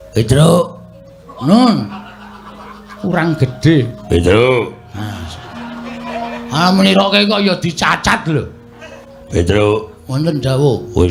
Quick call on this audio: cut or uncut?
uncut